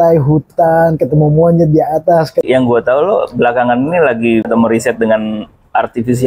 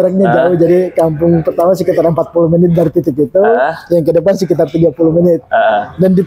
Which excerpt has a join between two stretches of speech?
first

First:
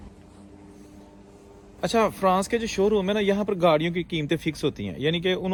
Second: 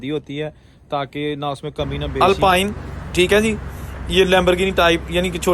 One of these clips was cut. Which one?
second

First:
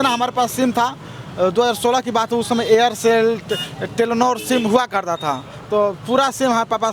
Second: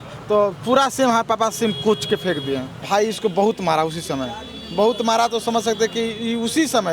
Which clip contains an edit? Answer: second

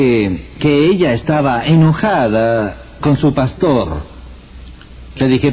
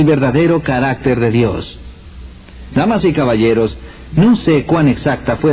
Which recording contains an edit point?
second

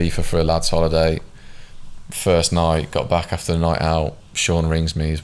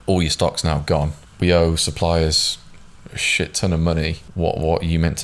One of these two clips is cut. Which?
second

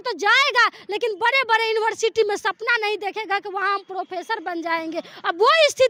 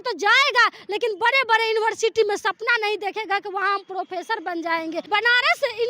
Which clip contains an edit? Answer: second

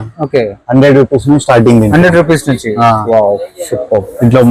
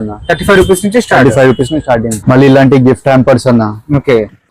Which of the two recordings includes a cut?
second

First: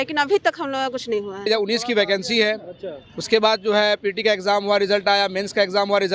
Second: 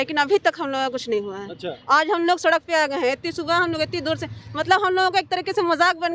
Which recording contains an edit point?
first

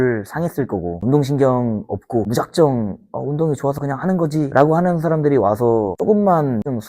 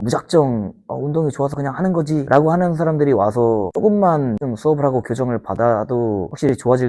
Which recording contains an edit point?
first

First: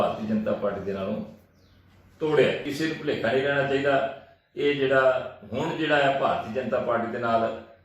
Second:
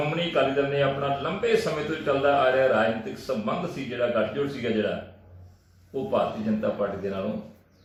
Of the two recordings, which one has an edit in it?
first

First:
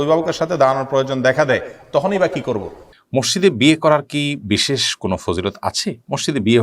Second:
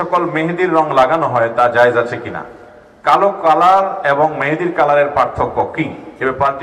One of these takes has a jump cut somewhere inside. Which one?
first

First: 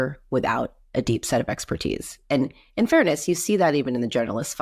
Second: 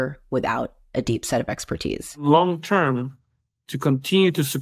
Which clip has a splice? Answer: second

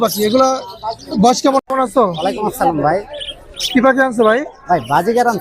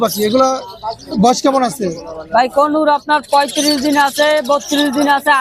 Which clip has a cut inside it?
first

